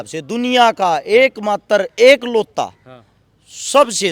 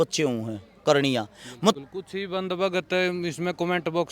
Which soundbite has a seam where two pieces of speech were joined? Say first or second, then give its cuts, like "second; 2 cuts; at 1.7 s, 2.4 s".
second; 1 cut; at 1.7 s